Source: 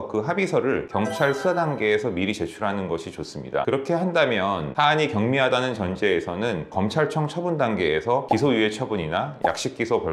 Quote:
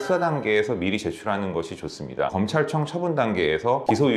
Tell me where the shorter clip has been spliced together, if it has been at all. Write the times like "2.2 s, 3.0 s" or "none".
2.3 s

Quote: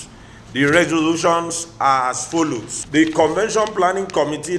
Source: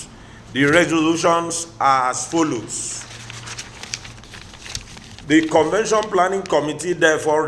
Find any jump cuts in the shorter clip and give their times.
2.7 s

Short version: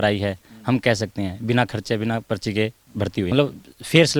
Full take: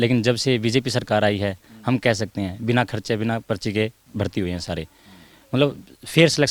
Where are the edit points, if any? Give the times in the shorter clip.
3.3 s

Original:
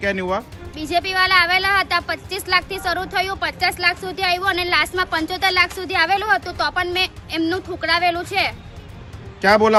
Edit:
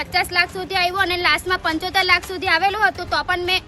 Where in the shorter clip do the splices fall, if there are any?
none

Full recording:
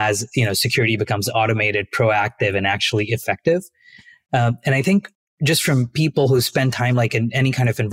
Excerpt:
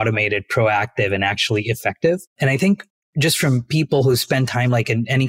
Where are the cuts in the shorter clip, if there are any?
2.3 s

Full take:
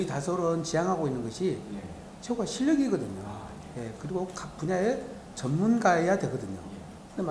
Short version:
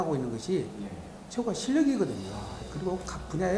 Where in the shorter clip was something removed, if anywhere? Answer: 2.6 s

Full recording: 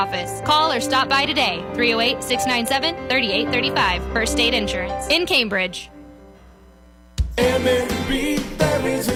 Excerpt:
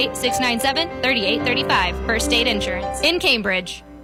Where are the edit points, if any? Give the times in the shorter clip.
none

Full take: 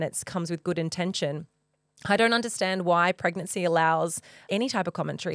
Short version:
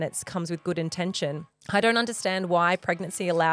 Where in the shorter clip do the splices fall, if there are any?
1.5 s

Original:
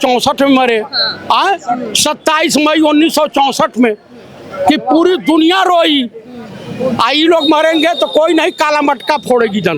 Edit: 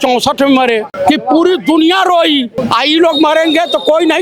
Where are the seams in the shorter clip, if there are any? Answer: 0.9 s, 2.6 s

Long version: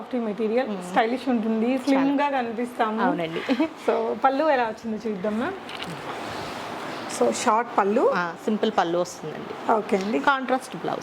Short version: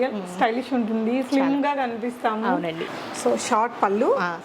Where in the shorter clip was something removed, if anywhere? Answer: 2.9 s

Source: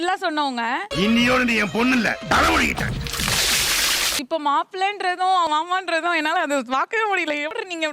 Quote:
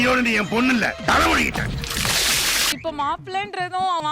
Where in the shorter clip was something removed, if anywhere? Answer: 2.7 s

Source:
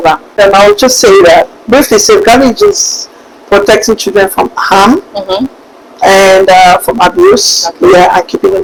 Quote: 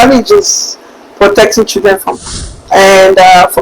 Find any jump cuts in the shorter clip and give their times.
2.2 s

